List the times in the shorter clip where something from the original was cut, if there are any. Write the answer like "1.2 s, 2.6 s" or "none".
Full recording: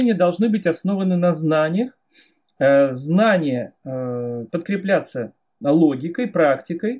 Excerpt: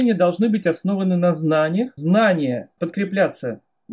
2.0 s, 2.7 s